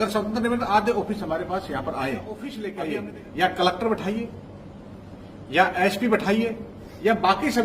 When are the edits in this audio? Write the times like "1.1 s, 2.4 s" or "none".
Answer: 2.6 s